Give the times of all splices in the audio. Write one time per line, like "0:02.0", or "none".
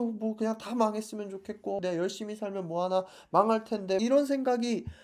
0:01.8
0:04.0